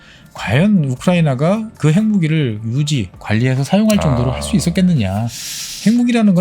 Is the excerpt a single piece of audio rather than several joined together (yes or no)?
no